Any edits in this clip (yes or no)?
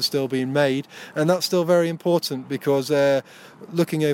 no